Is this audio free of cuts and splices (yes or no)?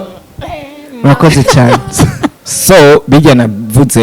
no